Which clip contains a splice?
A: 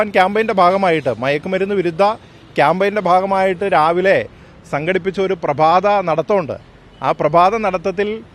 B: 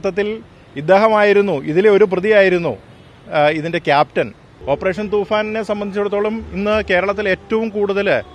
B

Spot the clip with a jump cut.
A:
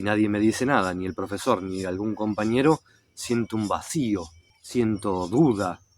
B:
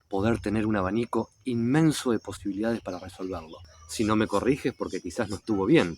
B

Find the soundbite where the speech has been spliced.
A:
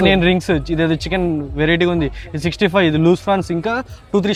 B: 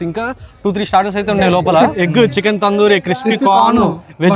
B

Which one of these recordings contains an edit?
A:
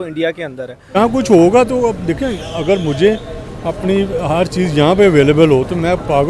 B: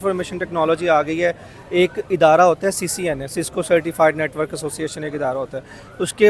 A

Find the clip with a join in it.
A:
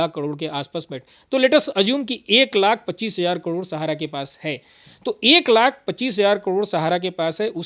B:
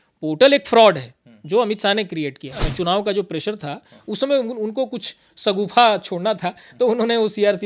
B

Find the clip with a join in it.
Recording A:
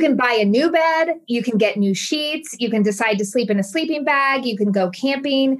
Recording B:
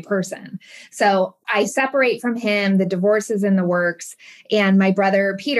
B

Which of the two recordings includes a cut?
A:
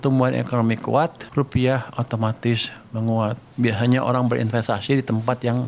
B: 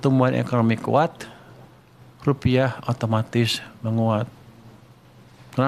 A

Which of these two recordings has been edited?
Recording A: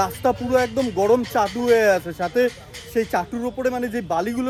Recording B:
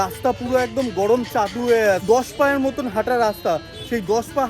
B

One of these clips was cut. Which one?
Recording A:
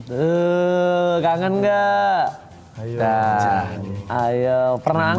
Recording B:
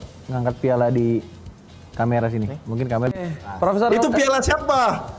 B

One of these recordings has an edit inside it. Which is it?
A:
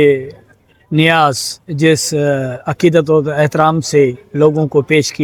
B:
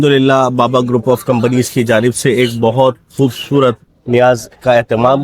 B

